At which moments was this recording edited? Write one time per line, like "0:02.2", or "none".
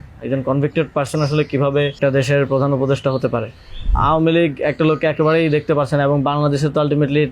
0:02.0
0:03.9